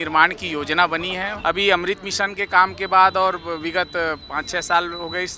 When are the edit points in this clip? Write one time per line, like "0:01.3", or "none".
0:01.3